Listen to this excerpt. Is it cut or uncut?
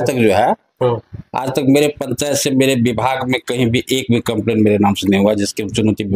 uncut